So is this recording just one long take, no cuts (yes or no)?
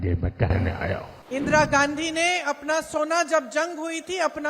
no